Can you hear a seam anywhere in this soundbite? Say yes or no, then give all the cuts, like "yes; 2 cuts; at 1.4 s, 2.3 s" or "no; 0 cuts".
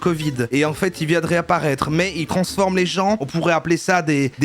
yes; 1 cut; at 3.2 s